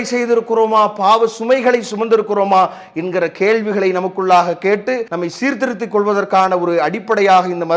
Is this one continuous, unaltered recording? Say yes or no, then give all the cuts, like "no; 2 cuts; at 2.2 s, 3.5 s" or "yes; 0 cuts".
no; 1 cut; at 5.1 s